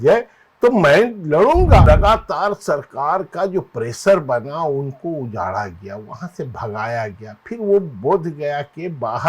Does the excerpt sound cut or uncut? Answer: cut